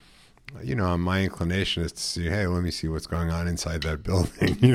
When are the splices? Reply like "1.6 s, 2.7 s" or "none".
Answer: none